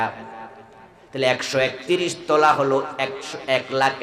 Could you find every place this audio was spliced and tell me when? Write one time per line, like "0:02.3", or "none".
none